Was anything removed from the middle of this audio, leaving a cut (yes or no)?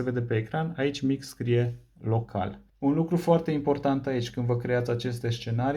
yes